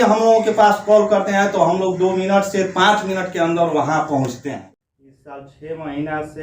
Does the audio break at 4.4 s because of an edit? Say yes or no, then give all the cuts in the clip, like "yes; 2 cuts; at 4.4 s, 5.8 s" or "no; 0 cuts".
yes; 1 cut; at 4.4 s